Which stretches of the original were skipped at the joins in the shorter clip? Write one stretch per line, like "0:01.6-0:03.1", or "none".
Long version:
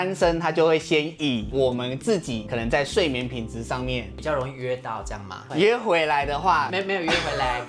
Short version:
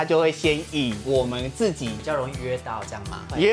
0:02.4-0:04.1

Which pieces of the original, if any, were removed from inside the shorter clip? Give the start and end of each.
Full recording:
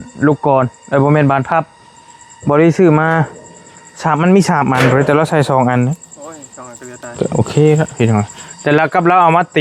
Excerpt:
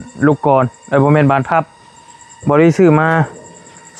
none

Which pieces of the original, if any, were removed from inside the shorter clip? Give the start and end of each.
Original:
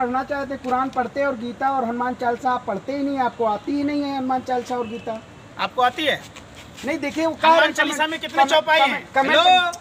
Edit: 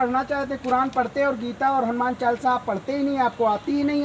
none

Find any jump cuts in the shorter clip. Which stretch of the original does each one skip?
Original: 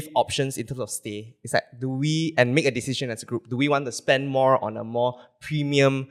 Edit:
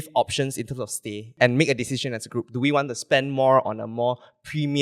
0:01.3-0:02.3

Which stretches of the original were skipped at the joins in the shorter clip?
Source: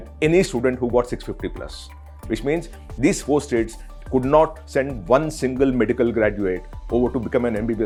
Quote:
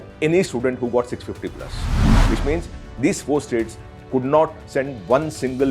none

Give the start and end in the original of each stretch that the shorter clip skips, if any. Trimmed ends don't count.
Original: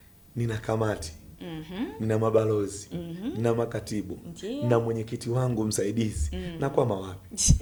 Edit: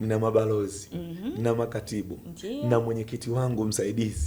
none

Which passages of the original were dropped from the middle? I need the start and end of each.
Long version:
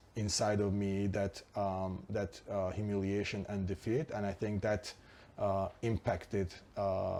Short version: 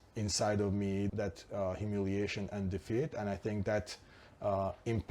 0:01.1-0:02.1

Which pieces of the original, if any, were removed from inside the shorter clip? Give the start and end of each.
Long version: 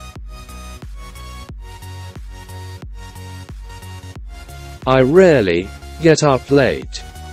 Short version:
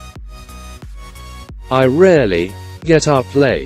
0:01.7-0:04.9

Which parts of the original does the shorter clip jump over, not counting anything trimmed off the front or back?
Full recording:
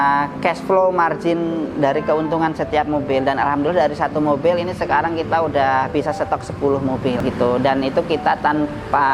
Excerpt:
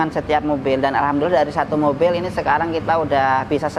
none

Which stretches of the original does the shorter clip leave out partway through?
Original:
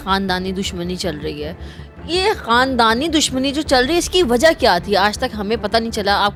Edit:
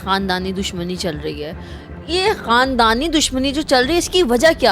none

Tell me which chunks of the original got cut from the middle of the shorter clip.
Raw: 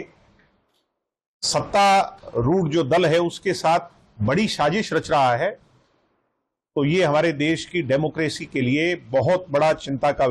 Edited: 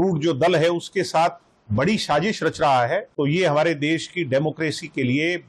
0:05.6-0:06.7

